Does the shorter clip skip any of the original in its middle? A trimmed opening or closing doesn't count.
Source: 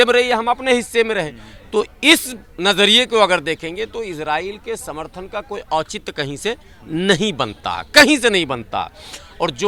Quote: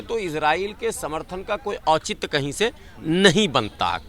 no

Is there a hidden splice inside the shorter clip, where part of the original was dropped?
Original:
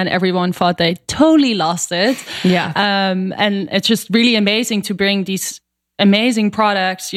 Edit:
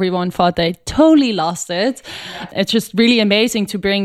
yes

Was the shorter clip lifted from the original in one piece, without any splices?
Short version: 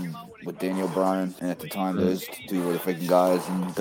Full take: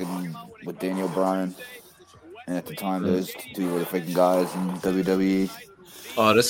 no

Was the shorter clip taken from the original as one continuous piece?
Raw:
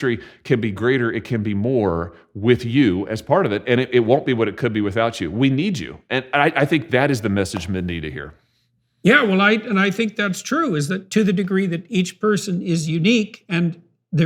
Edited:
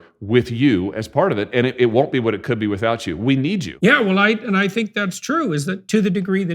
no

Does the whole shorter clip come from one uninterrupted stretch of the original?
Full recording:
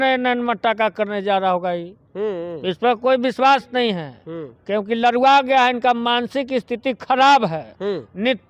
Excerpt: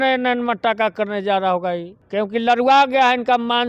no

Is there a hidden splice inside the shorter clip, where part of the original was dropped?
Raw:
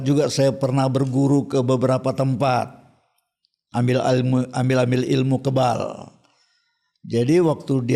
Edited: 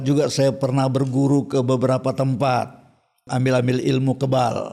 yes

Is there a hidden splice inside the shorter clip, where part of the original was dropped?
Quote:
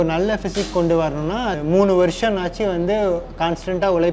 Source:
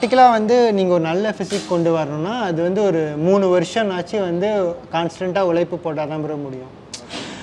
yes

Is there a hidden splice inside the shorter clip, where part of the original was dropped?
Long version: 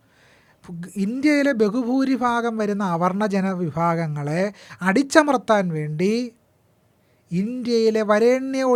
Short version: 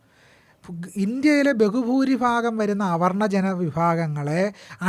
no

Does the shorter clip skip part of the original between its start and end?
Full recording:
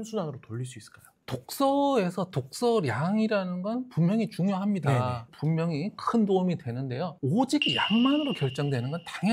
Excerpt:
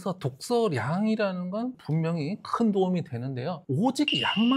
yes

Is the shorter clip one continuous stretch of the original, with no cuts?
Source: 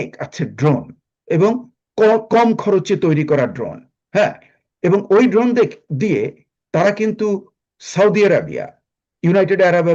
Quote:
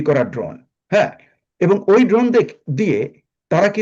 yes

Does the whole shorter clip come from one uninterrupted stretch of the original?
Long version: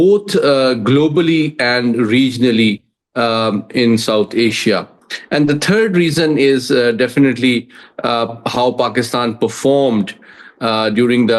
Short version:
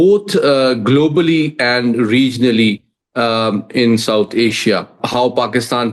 no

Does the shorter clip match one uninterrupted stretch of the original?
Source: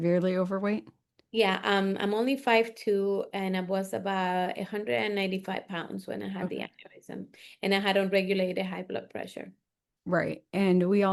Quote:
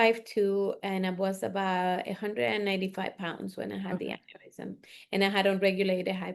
yes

